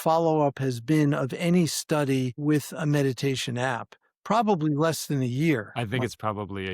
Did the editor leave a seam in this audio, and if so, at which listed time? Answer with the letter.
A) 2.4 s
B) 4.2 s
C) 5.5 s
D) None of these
A